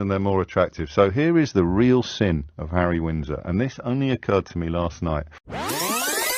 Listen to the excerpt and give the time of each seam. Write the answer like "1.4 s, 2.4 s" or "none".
5.4 s